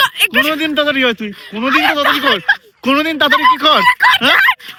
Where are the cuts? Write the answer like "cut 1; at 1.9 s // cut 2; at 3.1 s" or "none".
none